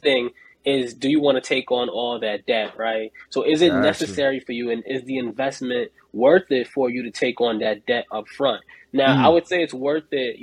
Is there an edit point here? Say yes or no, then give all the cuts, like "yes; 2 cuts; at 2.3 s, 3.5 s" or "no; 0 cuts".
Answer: no; 0 cuts